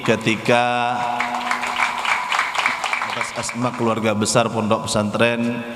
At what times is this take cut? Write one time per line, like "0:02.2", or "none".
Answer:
0:03.4